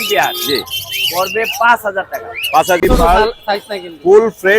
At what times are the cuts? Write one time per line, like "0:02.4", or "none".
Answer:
0:02.8